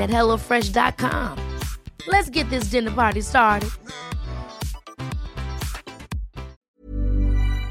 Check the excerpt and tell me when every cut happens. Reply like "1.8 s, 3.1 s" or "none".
6.6 s